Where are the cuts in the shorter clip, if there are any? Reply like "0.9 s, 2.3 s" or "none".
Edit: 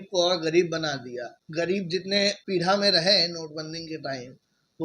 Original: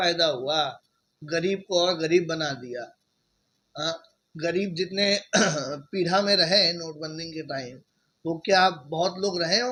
1.4 s, 2.4 s